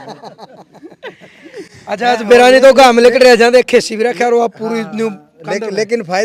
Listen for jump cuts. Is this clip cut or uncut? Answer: uncut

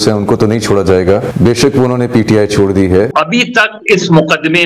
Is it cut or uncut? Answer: cut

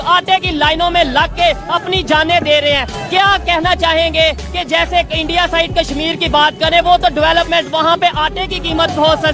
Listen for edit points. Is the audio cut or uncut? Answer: uncut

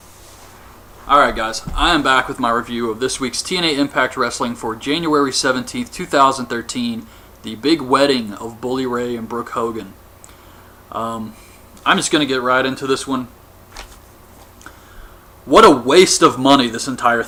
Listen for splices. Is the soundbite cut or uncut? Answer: uncut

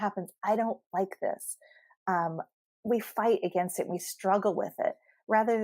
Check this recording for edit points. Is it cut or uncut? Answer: uncut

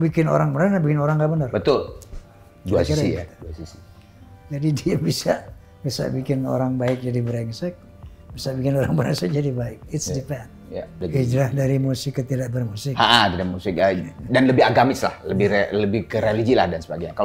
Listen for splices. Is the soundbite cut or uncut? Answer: cut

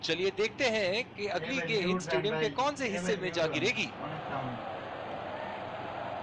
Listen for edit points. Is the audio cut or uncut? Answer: cut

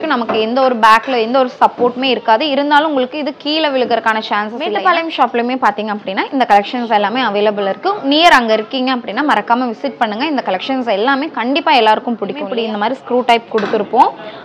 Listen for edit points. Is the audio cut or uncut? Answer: cut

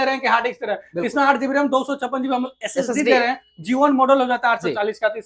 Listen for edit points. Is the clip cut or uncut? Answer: uncut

